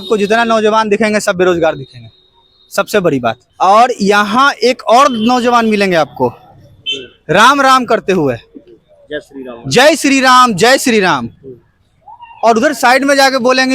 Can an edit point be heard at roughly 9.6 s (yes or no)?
no